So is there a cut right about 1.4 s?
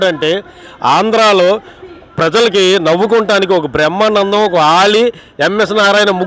no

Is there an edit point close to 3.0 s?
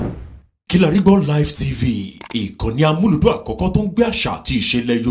no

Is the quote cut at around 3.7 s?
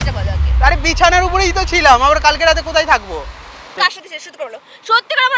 yes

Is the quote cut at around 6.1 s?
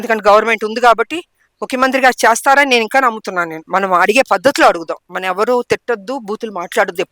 no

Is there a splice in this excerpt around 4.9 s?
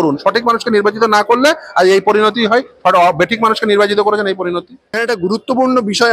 yes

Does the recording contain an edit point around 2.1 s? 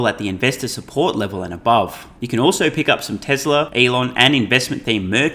yes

